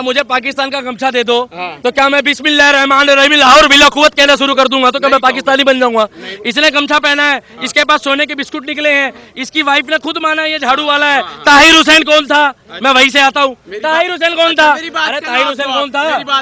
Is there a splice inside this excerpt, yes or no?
no